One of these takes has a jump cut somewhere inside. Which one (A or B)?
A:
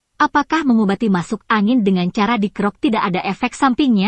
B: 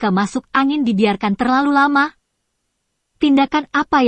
B